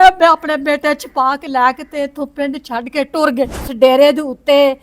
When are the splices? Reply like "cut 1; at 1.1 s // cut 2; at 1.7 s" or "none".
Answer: cut 1; at 3.7 s